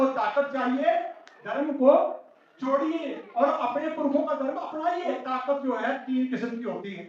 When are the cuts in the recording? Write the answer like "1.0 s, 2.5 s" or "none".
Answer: 5.2 s